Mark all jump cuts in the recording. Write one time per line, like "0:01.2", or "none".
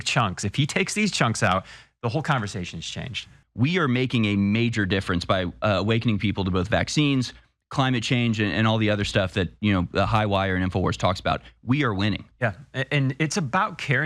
0:03.4